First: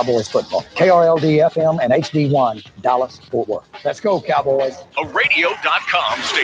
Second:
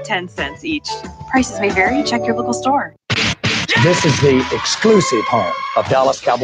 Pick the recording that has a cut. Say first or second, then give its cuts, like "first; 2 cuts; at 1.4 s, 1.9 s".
second; 1 cut; at 3.0 s